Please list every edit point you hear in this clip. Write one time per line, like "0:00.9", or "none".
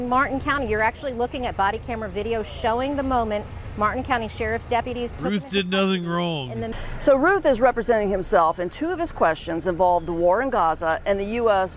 0:06.6